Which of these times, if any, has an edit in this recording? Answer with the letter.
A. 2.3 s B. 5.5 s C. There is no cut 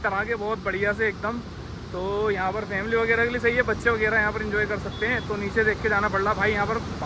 C